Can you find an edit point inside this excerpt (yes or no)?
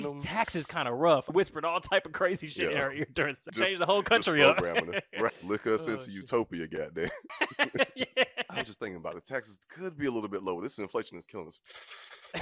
yes